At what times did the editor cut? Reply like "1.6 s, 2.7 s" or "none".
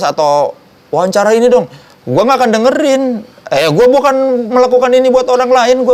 none

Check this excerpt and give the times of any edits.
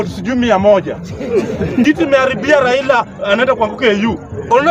1.8 s

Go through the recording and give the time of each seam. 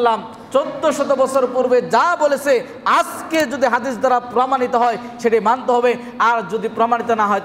none

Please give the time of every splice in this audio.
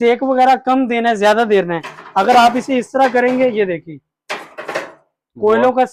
none

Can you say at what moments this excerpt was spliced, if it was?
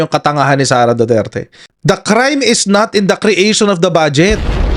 none

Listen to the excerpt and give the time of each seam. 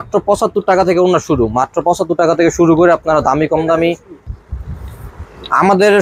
4.1 s

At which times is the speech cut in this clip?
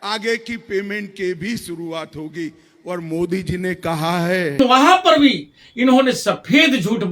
4.6 s

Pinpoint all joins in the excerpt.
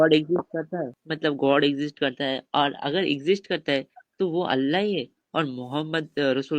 1.0 s

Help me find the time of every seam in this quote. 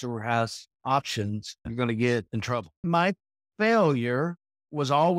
1.6 s, 2.8 s

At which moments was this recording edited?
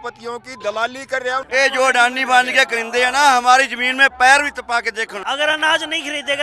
1.5 s, 5.2 s

